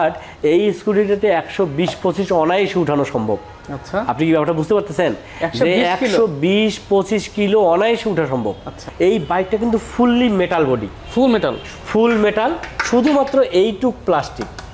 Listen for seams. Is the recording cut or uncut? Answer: cut